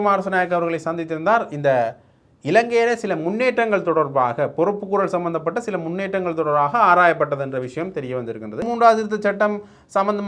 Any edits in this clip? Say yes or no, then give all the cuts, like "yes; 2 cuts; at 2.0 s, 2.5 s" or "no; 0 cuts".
yes; 1 cut; at 8.6 s